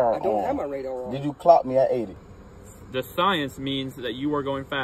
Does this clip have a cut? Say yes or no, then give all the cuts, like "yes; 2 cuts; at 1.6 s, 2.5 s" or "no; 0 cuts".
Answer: yes; 1 cut; at 2.2 s